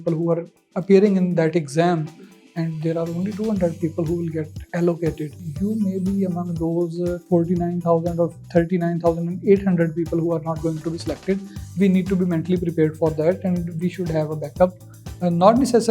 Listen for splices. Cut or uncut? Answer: cut